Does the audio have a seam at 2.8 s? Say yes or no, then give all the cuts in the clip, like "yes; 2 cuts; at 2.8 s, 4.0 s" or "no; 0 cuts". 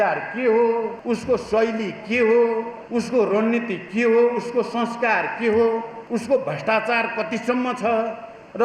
yes; 3 cuts; at 0.9 s, 2.8 s, 5.9 s